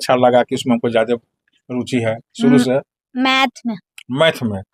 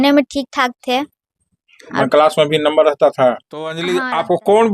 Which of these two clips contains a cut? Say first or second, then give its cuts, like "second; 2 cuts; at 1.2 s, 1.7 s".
second; 1 cut; at 3.8 s